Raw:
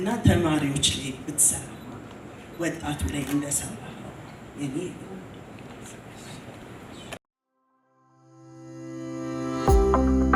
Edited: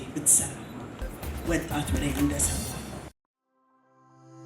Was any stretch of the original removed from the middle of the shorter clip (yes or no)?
yes